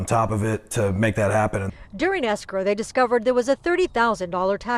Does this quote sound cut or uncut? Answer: cut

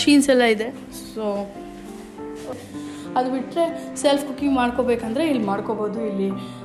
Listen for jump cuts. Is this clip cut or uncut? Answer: cut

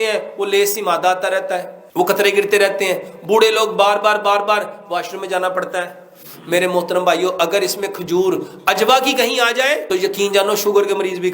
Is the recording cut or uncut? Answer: cut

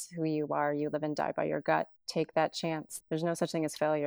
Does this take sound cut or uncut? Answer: cut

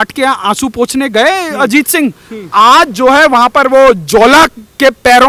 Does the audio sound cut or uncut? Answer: uncut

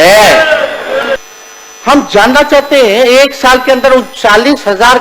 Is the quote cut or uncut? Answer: cut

